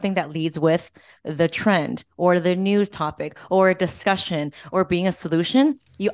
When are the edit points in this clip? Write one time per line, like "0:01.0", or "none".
none